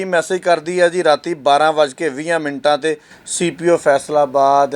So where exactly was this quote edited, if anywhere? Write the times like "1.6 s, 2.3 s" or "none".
none